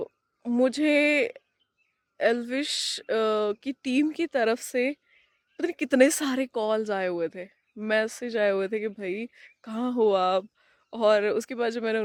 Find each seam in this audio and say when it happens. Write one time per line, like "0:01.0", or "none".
none